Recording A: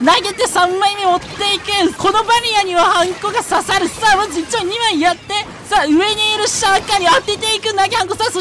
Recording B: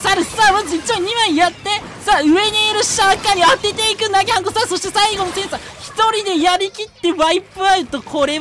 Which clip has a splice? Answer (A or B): A